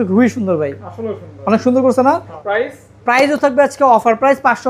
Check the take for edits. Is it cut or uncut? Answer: cut